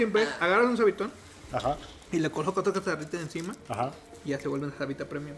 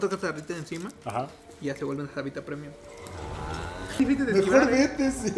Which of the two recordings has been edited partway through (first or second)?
second